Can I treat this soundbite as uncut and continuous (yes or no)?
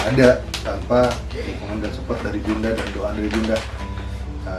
yes